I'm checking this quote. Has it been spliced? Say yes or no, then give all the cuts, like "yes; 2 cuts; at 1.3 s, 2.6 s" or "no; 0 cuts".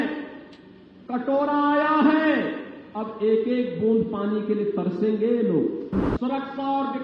yes; 1 cut; at 6.0 s